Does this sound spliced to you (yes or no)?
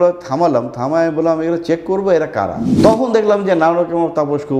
yes